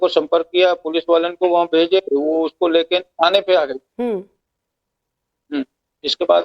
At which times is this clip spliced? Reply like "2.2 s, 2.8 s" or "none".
1.7 s